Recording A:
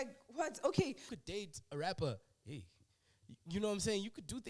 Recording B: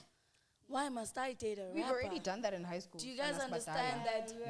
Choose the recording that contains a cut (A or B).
A